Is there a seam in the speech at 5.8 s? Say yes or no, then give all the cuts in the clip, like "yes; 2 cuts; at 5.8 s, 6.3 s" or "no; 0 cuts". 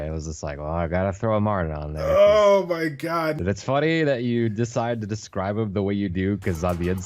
no; 1 cut; at 3.4 s